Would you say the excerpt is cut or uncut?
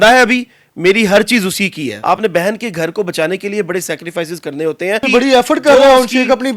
cut